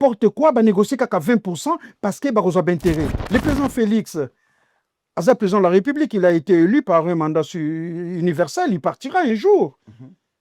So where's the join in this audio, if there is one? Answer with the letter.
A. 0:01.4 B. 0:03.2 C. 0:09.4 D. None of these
B